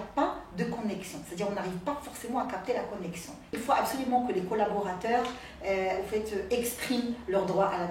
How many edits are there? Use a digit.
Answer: 1